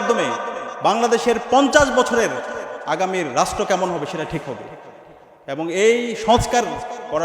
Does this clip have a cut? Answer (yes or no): no